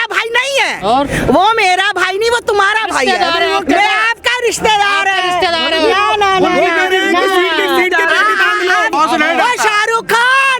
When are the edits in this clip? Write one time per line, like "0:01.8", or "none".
0:08.9